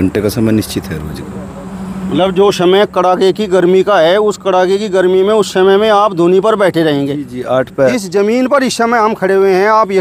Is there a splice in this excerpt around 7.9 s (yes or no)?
yes